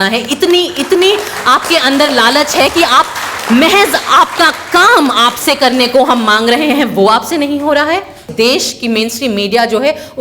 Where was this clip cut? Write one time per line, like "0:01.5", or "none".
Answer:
0:08.3